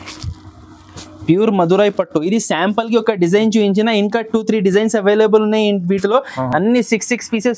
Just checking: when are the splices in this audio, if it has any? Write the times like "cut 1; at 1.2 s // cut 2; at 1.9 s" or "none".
none